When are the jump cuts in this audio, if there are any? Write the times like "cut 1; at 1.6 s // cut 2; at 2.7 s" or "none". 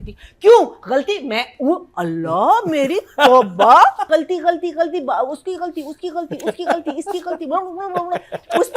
cut 1; at 4.0 s